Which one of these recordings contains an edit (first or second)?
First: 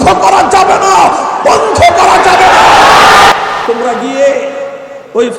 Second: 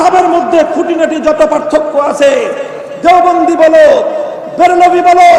first